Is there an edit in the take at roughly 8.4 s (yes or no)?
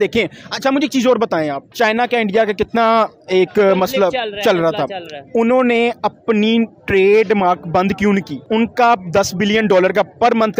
yes